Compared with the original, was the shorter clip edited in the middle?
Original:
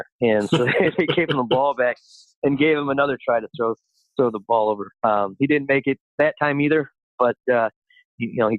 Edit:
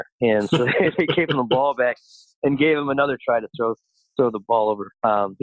no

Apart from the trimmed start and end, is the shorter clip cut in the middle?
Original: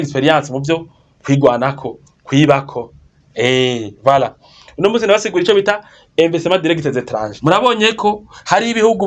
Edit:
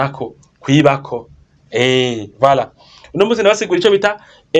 no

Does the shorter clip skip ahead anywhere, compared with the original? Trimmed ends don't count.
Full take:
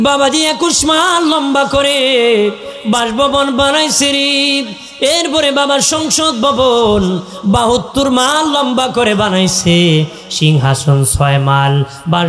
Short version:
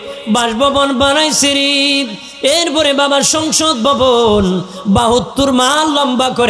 no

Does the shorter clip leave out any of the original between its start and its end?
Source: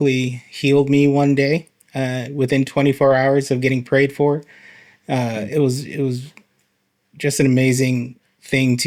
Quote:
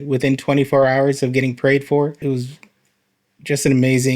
yes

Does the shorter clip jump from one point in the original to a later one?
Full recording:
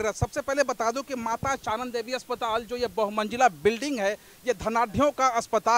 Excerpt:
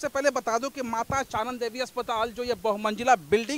no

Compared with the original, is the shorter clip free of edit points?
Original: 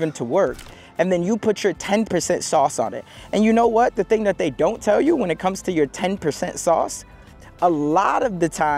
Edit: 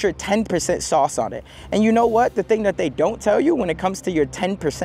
yes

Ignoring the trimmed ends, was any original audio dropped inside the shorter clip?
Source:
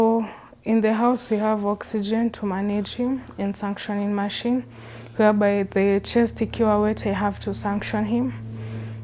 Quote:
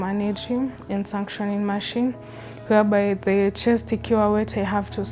no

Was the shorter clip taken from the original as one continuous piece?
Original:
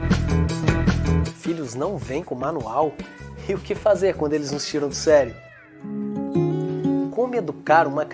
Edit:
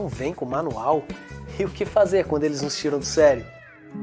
yes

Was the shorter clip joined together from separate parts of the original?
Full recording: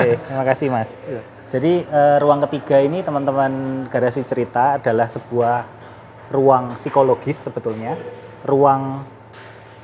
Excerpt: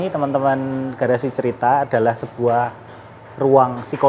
no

